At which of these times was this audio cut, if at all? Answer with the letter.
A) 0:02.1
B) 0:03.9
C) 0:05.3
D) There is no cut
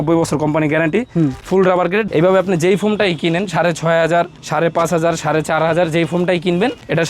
A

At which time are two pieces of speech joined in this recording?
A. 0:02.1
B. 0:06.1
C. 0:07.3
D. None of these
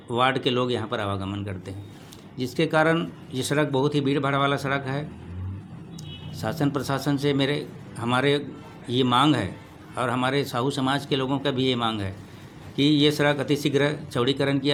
D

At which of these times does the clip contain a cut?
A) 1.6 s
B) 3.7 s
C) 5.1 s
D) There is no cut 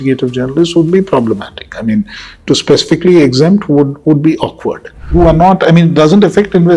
C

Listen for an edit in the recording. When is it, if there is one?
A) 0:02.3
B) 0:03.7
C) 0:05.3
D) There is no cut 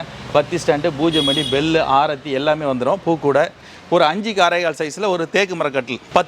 B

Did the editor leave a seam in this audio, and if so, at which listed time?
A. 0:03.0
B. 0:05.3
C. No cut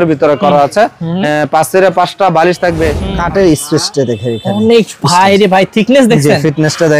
A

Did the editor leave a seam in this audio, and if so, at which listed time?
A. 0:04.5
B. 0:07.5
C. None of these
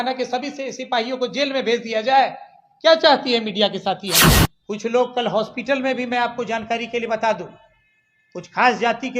A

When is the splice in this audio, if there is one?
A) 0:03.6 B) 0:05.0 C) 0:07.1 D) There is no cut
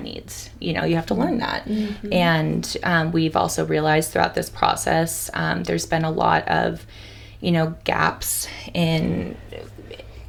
D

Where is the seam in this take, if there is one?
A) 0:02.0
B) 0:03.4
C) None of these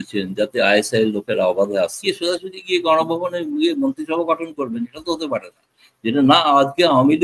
A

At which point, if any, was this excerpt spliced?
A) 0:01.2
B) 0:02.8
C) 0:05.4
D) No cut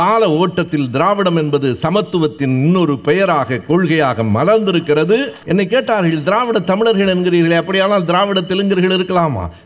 C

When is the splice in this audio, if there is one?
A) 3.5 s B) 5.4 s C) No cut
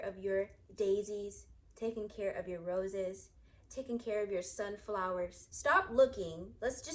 B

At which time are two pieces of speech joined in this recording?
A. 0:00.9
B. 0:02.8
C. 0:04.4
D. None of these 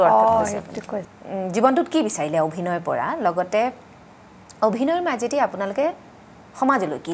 A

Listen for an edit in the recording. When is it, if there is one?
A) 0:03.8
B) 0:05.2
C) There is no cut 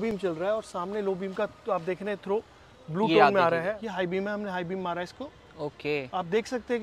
A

